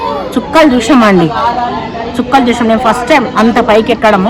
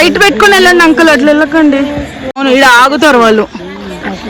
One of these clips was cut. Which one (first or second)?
second